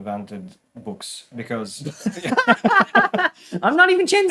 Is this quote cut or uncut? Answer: uncut